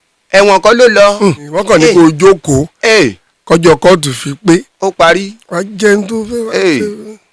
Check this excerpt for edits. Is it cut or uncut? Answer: cut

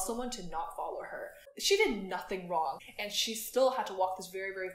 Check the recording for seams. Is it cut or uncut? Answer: cut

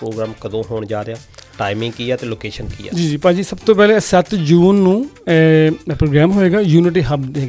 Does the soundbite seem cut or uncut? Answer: uncut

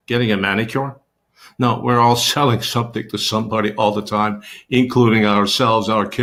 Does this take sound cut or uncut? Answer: uncut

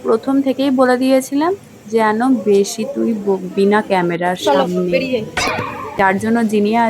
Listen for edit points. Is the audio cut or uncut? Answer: cut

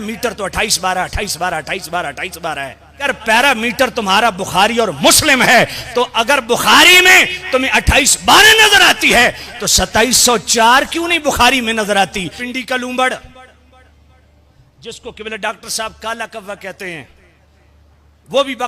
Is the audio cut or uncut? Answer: cut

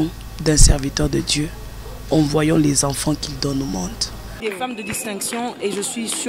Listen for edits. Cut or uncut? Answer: cut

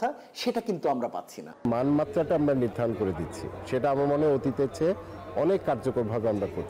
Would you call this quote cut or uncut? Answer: cut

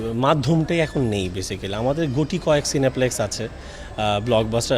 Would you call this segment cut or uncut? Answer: uncut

